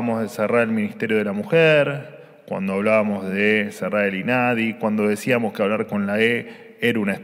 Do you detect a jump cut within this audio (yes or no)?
no